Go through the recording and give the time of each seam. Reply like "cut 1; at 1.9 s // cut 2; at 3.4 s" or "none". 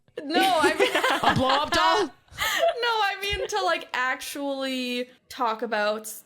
cut 1; at 5.2 s